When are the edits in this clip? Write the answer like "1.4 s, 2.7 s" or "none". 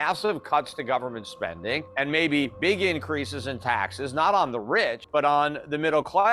1.9 s, 5.0 s